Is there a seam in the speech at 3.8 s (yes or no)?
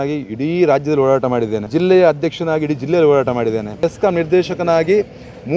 yes